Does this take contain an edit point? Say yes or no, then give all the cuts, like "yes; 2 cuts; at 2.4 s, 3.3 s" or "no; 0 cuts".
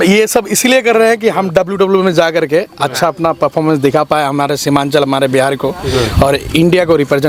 no; 0 cuts